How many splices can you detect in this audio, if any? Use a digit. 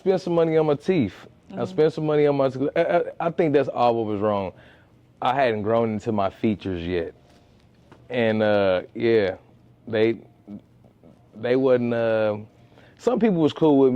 0